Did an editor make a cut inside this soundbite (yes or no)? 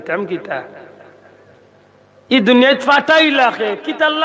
no